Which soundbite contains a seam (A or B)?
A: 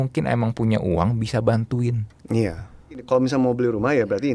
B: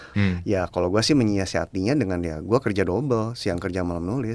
A